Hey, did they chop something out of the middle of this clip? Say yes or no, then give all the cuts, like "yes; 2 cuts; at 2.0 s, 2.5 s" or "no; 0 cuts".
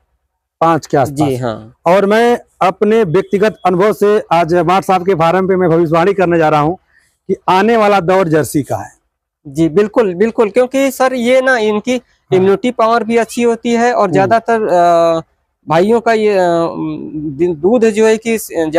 no; 0 cuts